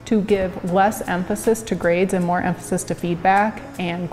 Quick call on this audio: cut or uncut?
uncut